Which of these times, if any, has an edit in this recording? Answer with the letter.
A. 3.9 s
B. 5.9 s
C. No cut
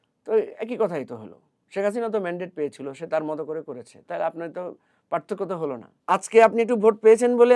B